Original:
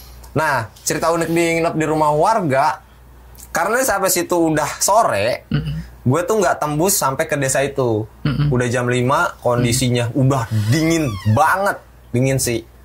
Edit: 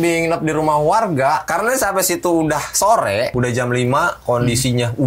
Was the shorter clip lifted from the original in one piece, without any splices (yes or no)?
no